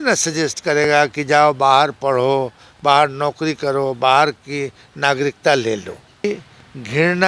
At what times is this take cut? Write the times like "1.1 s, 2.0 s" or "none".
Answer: 6.2 s

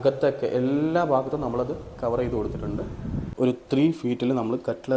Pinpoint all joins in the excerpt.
3.2 s

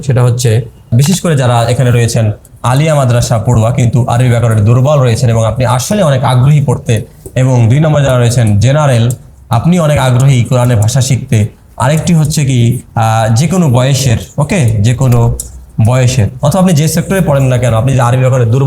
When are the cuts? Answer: 0.9 s

